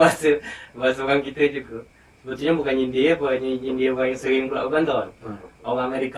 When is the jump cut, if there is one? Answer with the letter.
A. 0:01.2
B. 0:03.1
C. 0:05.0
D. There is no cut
D